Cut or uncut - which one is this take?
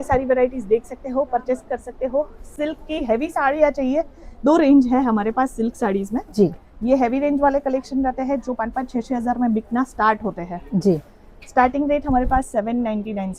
uncut